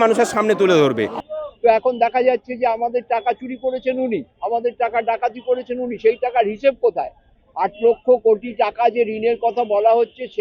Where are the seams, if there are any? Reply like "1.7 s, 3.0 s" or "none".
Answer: 1.2 s